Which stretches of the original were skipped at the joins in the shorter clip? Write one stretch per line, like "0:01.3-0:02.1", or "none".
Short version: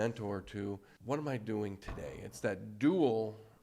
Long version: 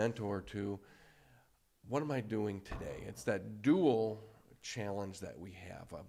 0:00.9-0:01.7